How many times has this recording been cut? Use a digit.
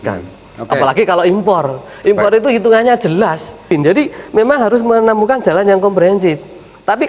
1